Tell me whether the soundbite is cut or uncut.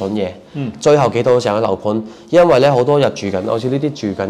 uncut